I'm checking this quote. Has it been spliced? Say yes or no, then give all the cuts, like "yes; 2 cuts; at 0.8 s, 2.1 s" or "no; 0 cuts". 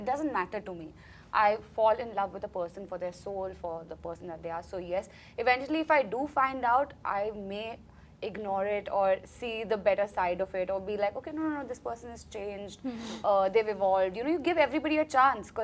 no; 0 cuts